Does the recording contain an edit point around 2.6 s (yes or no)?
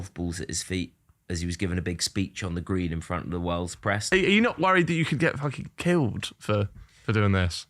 no